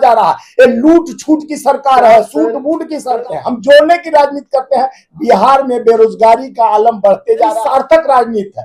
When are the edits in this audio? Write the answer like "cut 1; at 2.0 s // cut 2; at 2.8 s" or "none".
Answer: cut 1; at 3.2 s // cut 2; at 7.6 s